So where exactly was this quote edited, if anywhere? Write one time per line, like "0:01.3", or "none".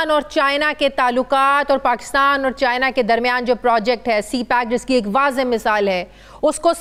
none